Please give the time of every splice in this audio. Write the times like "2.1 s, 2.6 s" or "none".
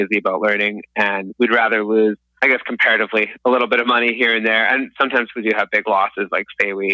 2.3 s

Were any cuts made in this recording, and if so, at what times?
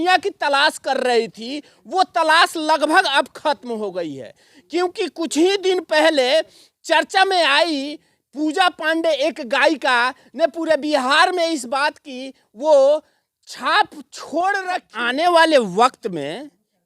14.9 s

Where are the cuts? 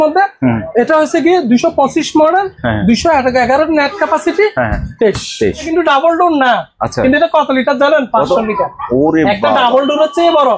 5.7 s

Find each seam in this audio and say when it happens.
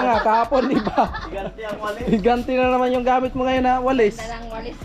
none

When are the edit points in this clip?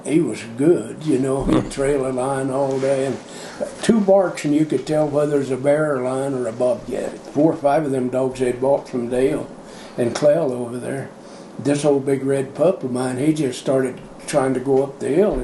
7.1 s

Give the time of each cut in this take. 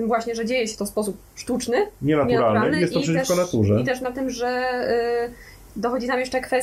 none

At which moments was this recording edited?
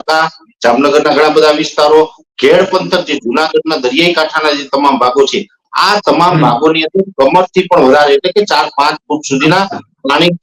none

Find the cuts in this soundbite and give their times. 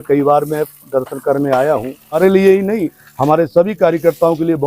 2.2 s

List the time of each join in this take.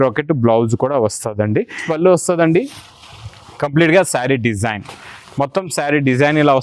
1.8 s

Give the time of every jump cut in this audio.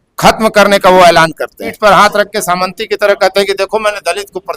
1.7 s

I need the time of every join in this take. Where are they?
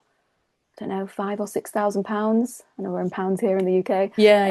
none

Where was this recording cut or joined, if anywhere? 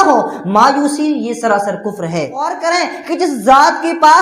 2.6 s

